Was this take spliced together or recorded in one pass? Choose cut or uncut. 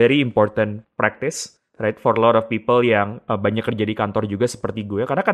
uncut